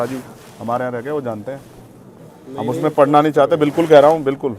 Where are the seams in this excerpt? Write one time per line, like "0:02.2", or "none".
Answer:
none